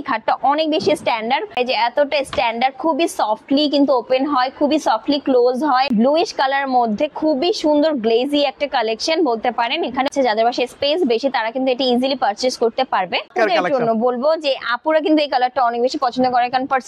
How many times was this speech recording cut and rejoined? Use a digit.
4